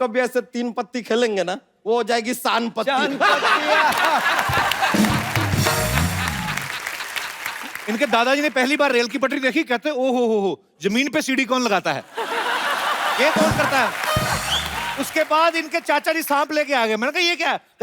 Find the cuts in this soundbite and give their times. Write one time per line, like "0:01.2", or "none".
0:01.7
0:07.7
0:14.9